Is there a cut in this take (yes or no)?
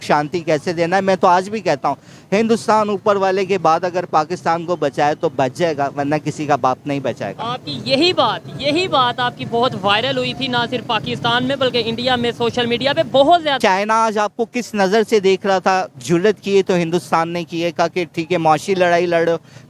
yes